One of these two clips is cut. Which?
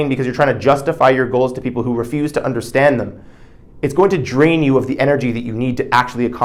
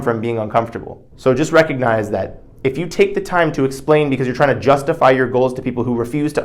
second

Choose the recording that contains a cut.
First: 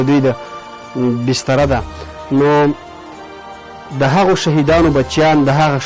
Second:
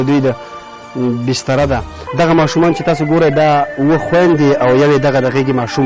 second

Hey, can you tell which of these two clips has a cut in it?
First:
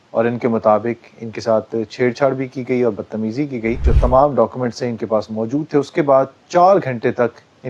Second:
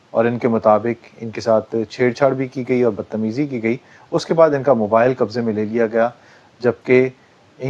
first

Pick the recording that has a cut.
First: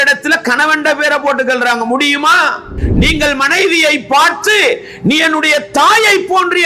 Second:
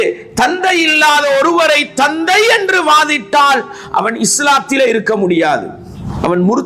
first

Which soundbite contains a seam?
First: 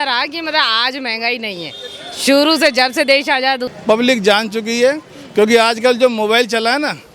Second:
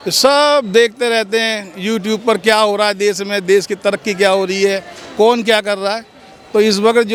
first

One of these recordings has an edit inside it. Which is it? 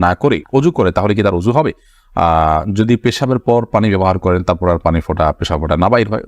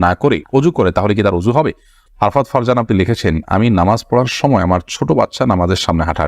second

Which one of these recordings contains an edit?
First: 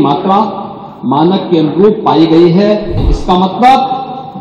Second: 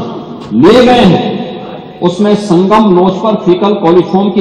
first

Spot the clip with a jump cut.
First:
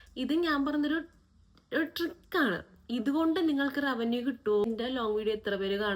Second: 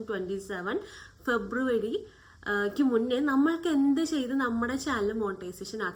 first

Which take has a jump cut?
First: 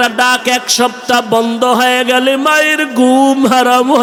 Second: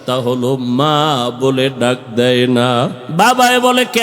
second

